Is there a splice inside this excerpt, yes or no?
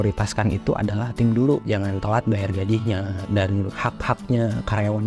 yes